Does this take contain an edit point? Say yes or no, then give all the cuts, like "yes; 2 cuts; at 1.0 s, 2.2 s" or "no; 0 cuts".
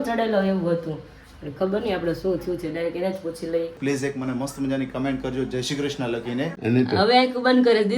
yes; 2 cuts; at 3.8 s, 6.6 s